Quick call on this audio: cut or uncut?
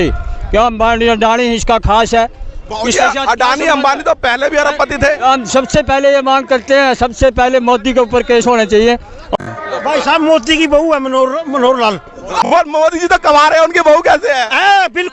cut